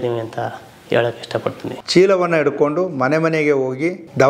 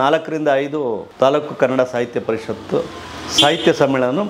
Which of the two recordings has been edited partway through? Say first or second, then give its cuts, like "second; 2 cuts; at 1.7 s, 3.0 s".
first; 1 cut; at 1.7 s